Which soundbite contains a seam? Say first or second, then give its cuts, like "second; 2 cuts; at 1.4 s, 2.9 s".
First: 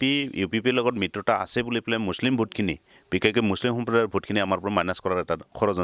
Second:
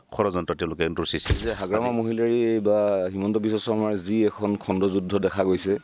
second; 1 cut; at 1.5 s